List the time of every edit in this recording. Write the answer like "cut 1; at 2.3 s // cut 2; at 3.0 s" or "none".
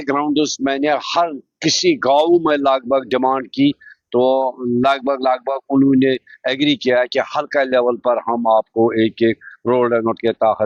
none